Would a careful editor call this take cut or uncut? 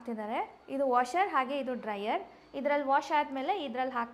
uncut